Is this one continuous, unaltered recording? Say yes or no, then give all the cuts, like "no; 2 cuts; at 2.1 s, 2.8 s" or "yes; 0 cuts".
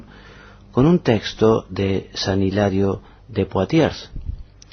no; 1 cut; at 3.7 s